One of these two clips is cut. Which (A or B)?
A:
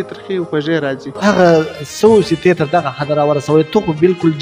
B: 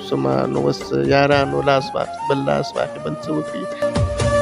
A